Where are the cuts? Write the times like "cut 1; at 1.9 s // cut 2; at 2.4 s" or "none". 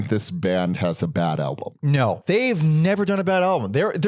cut 1; at 2.2 s